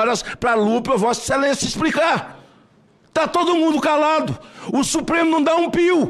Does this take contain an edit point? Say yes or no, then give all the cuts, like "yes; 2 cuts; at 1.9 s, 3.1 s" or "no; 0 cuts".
no; 0 cuts